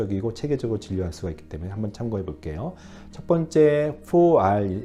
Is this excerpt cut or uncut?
uncut